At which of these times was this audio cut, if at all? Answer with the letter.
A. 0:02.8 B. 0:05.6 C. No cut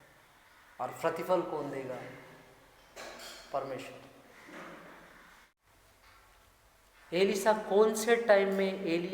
B